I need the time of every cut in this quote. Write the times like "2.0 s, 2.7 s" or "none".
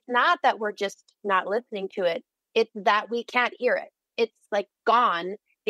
2.3 s, 4.0 s